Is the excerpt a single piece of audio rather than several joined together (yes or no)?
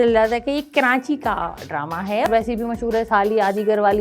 no